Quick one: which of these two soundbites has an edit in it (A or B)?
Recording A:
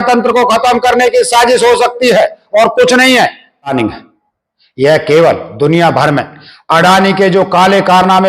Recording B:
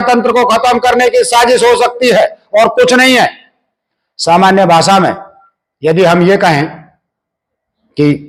A